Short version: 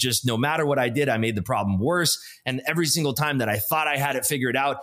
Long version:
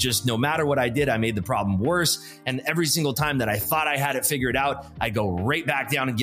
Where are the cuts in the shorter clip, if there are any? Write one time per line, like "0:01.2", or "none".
none